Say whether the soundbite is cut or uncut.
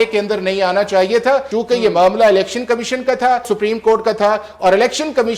cut